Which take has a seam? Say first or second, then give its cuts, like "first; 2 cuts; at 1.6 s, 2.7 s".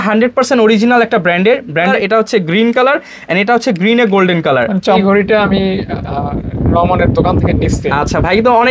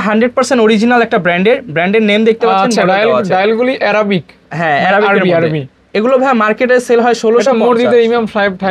first; 2 cuts; at 1.9 s, 5.0 s